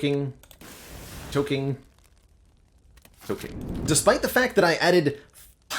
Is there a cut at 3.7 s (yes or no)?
yes